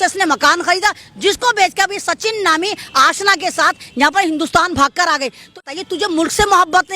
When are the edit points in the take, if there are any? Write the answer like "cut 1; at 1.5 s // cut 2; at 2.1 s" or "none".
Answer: cut 1; at 5.6 s